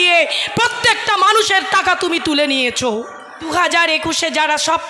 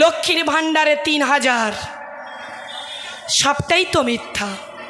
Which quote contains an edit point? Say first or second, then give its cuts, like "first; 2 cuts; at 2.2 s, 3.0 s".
first; 1 cut; at 3.4 s